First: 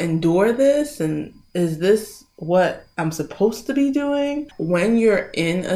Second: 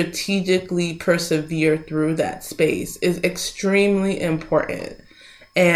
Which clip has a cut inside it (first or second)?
first